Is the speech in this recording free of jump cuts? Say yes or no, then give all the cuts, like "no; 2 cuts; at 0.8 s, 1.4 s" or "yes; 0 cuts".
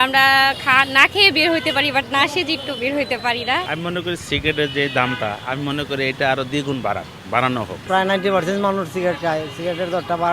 no; 2 cuts; at 3.7 s, 7.8 s